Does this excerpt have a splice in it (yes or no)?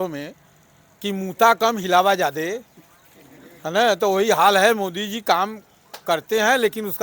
no